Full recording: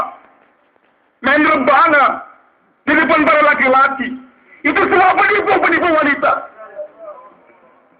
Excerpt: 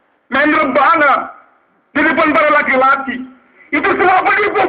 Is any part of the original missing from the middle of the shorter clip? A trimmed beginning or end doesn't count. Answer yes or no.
no